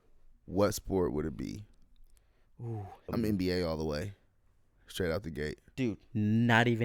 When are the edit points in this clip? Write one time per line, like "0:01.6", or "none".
0:03.1